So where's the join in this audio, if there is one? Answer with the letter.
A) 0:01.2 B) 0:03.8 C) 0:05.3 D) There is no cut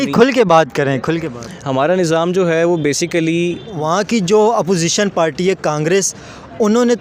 B